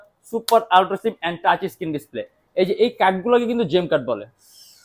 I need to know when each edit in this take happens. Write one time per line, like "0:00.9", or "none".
none